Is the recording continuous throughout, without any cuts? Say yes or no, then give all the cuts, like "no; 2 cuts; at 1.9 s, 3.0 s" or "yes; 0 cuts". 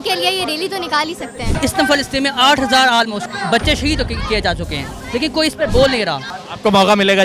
no; 2 cuts; at 1.5 s, 6.3 s